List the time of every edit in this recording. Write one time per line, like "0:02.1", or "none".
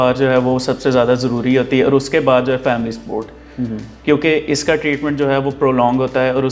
none